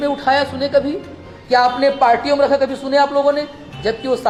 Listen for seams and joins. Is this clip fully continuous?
yes; 0 cuts

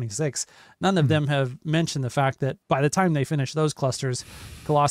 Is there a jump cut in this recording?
yes; 1 cut; at 2.6 s

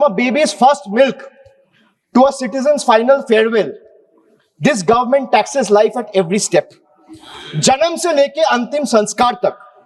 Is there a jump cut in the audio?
no; 0 cuts

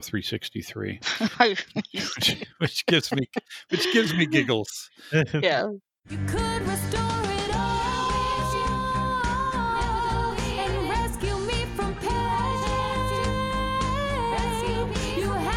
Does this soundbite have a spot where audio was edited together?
yes; 1 cut; at 6.0 s

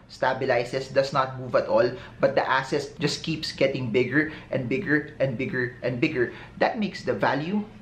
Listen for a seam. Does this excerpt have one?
no; 0 cuts

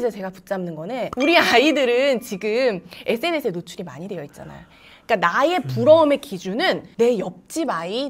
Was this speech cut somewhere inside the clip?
yes; 1 cut; at 1.1 s

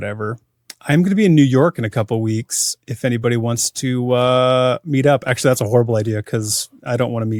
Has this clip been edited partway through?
no; 0 cuts

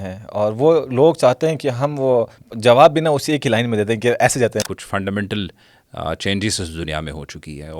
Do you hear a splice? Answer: yes; 2 cuts; at 2.4 s, 4.7 s

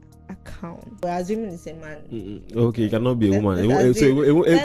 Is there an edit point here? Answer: yes; 1 cut; at 1.0 s

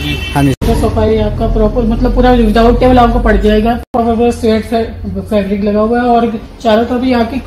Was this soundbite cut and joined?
yes; 2 cuts; at 1.1 s, 3.9 s

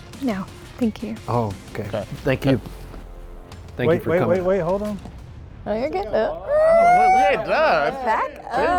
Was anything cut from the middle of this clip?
no; 0 cuts

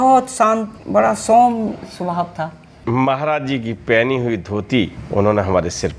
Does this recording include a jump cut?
yes; 2 cuts; at 2.7 s, 5.0 s

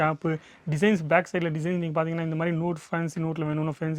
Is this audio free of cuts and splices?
yes; 0 cuts

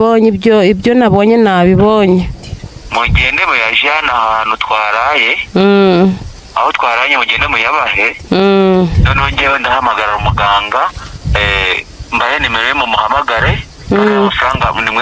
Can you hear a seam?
no; 0 cuts

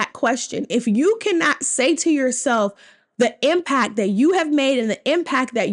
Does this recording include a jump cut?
no; 0 cuts

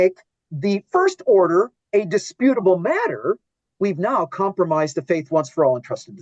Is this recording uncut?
yes; 0 cuts

